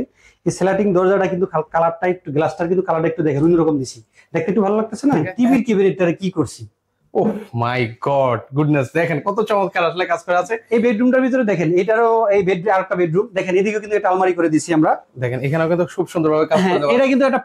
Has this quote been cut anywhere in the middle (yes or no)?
yes